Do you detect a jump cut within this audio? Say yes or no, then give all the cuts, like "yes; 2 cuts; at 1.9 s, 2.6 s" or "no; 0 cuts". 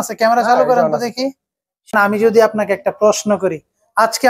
yes; 1 cut; at 1.9 s